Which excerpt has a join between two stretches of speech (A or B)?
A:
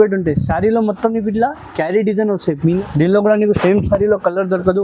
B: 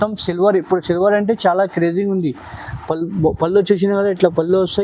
A